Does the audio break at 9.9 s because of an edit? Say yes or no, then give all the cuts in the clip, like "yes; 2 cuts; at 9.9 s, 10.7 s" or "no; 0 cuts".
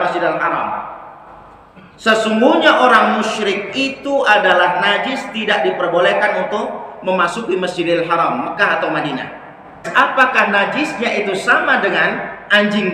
yes; 1 cut; at 9.9 s